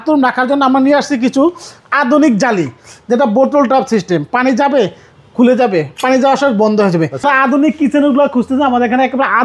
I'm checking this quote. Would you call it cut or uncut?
cut